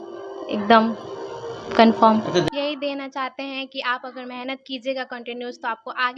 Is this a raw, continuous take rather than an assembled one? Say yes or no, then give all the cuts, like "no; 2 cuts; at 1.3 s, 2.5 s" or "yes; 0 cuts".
no; 1 cut; at 2.5 s